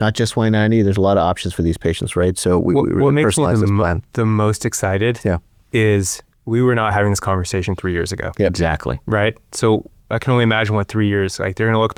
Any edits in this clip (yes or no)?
no